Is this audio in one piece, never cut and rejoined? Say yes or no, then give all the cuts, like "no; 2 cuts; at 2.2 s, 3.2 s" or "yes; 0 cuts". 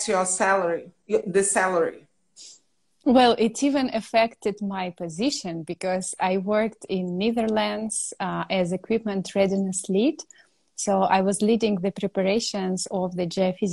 yes; 0 cuts